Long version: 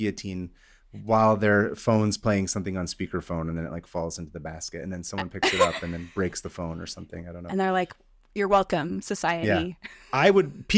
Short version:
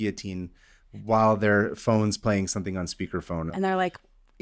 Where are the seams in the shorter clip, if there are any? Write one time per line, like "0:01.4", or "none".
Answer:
0:03.5